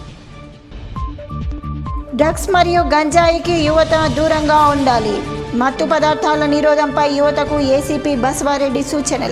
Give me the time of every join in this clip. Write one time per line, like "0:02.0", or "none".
0:00.7
0:01.8